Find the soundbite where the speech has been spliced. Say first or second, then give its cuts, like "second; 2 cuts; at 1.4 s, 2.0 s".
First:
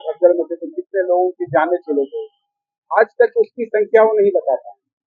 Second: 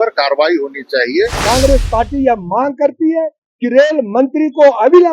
second; 1 cut; at 1.4 s